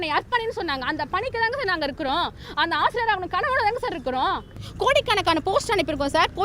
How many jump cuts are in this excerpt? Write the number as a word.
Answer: one